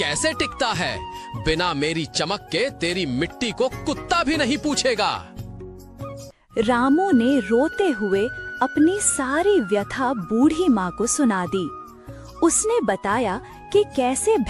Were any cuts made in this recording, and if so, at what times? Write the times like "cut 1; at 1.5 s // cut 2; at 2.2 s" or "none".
cut 1; at 6.3 s